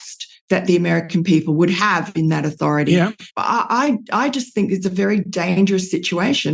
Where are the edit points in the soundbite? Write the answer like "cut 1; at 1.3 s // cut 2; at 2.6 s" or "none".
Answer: cut 1; at 3.3 s